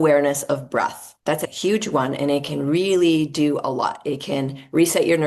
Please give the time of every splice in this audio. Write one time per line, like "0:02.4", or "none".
0:01.0